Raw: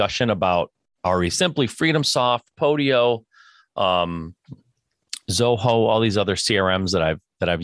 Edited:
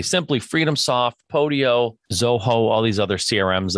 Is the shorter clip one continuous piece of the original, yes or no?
no